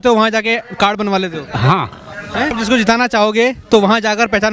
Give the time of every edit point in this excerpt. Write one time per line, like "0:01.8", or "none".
0:02.5